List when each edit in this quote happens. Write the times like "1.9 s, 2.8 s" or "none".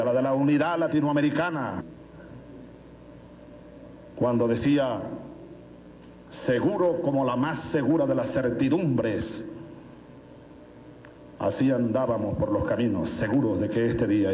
none